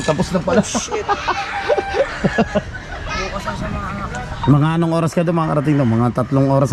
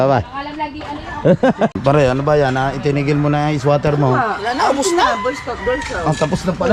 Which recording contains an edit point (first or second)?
second